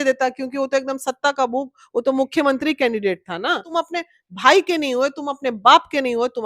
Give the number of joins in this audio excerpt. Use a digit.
1